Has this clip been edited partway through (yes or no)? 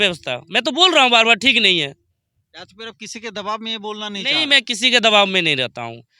no